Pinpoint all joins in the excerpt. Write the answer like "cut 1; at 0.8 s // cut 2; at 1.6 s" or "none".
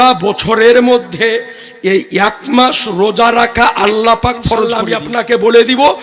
cut 1; at 4.8 s

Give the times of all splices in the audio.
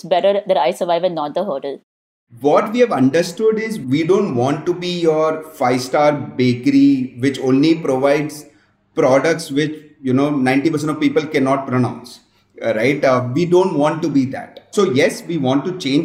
cut 1; at 2.1 s

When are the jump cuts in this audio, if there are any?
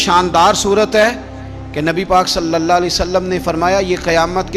none

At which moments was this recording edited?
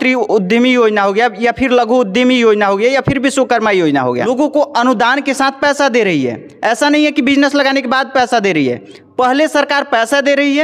cut 1; at 4.3 s

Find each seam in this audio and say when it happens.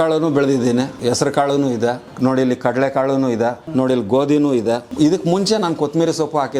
cut 1; at 0.9 s // cut 2; at 2.1 s // cut 3; at 3.6 s // cut 4; at 4.9 s

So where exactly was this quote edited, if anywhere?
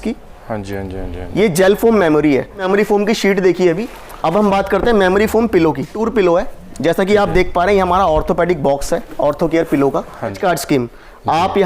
cut 1; at 2.7 s // cut 2; at 6.0 s // cut 3; at 10.4 s

